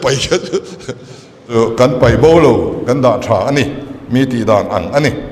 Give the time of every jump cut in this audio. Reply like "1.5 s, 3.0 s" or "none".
1.6 s